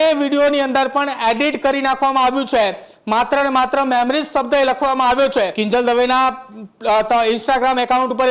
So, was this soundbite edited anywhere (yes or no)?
yes